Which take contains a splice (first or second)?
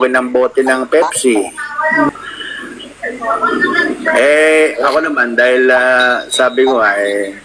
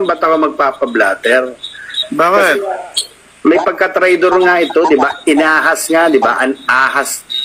first